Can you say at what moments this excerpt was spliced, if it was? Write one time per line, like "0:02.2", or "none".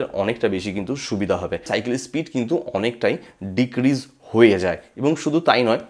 0:01.7